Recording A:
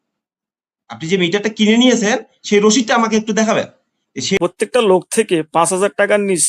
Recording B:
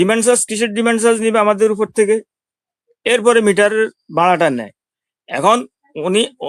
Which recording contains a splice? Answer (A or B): A